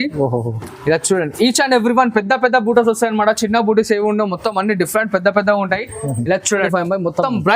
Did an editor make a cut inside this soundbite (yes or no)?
yes